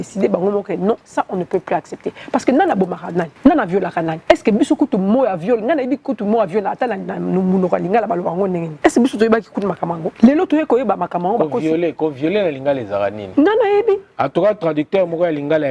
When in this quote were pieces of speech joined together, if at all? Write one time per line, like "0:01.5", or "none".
0:03.3
0:04.1
0:08.7
0:10.0